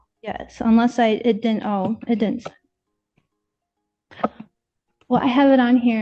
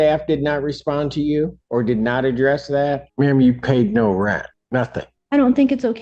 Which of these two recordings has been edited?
second; 3 cuts; at 1.6 s, 3.1 s, 4.8 s

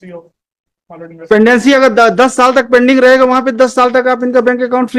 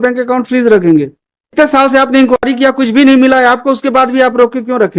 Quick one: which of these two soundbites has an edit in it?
second; 1 cut; at 1.5 s

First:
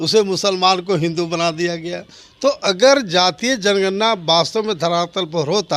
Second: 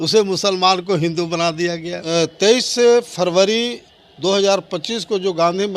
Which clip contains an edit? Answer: second; 1 cut; at 1.9 s

